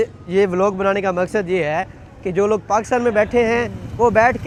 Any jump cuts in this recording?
no; 0 cuts

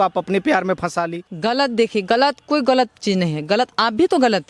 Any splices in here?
yes; 1 cut; at 1.2 s

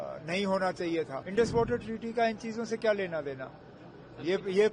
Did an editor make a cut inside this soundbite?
yes; 1 cut; at 1.2 s

